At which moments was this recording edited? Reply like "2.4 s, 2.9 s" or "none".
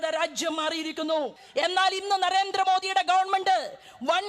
1.4 s

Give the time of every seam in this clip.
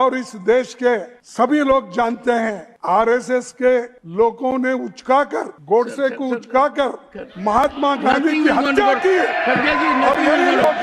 1.2 s, 2.7 s, 4.0 s, 5.5 s

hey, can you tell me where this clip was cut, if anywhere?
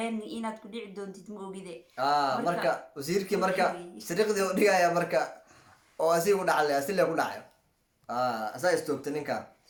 none

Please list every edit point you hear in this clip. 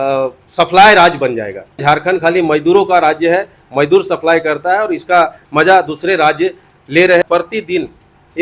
1.8 s, 7.2 s

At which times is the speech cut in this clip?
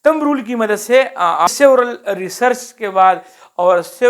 1.5 s

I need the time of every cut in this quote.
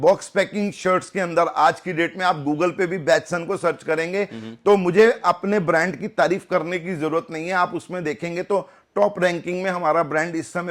none

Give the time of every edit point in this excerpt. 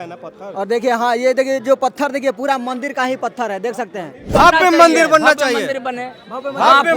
4.3 s

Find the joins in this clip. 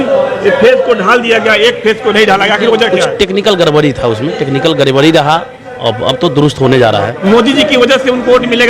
7.1 s

